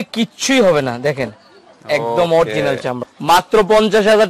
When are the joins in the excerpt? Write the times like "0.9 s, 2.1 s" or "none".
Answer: 3.0 s

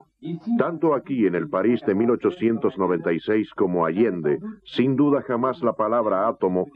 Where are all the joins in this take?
2.2 s

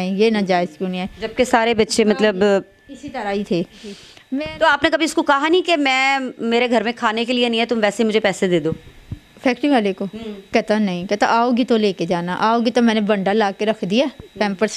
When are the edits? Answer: 4.1 s

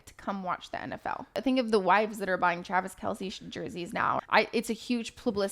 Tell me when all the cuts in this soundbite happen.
1.4 s, 4.2 s

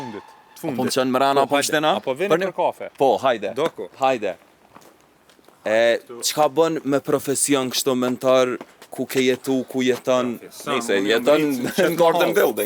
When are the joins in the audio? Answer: none

